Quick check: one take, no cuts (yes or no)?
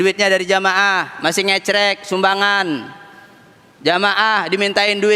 yes